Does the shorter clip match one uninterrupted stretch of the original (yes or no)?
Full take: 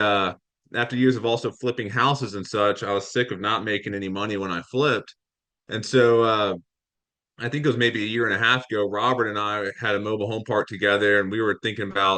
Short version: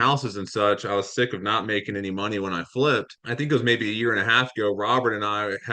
no